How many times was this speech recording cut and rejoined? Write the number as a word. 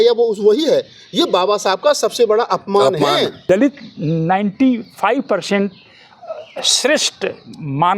one